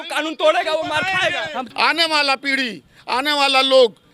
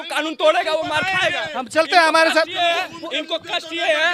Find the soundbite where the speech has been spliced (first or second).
first